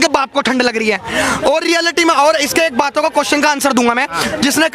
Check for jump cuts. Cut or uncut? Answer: uncut